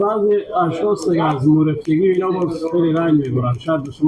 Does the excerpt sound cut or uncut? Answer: uncut